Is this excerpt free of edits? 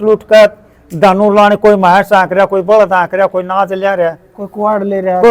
yes; 0 cuts

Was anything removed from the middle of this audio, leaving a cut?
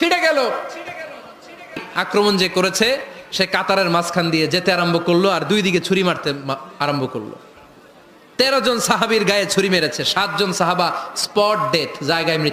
yes; 1 cut; at 1.9 s

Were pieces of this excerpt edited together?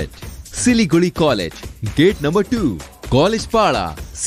no; 0 cuts

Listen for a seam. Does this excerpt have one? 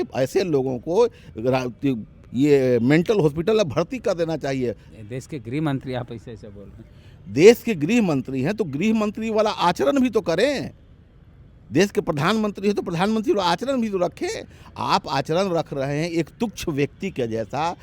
no; 0 cuts

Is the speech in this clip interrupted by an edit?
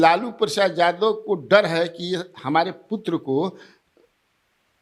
no; 0 cuts

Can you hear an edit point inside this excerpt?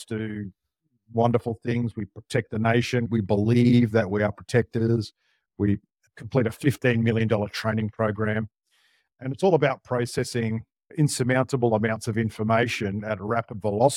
yes; 2 cuts; at 3.1 s, 5.9 s

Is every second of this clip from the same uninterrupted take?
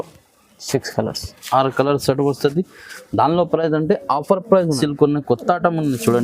no; 1 cut; at 4.7 s

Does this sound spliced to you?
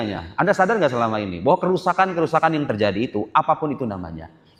no; 0 cuts

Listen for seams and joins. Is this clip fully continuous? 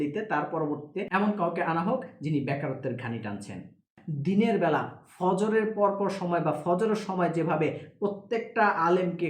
no; 1 cut; at 4.0 s

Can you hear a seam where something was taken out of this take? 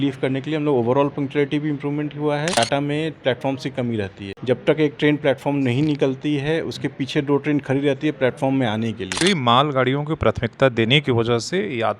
yes; 3 cuts; at 2.5 s, 4.2 s, 9.2 s

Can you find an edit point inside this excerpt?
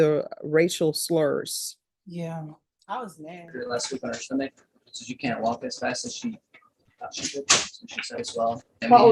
yes; 2 cuts; at 3.5 s, 8.2 s

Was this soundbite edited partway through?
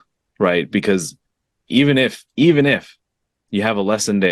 no; 0 cuts

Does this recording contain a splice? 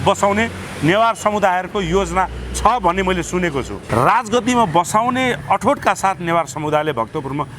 yes; 1 cut; at 3.8 s

